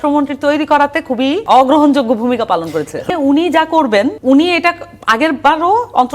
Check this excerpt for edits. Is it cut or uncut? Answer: cut